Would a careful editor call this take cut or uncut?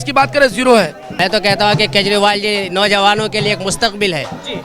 cut